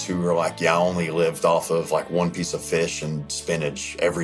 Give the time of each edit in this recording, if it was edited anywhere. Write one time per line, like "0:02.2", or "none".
none